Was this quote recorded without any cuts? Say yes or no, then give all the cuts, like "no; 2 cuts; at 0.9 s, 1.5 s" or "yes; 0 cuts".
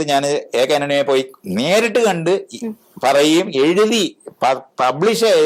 yes; 0 cuts